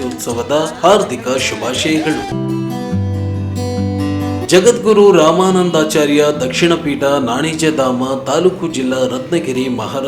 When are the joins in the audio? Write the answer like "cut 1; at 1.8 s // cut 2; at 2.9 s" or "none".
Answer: cut 1; at 2.3 s

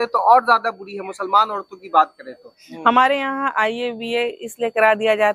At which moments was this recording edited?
cut 1; at 2.6 s

